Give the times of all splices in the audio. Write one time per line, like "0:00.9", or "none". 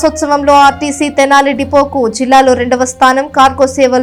none